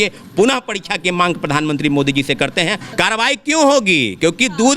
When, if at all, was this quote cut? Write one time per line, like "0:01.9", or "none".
0:02.8